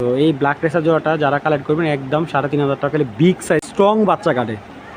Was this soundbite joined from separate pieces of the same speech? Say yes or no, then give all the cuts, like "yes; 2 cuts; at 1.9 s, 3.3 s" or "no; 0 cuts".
yes; 1 cut; at 3.6 s